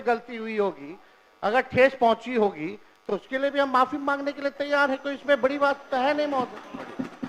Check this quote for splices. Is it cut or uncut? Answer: uncut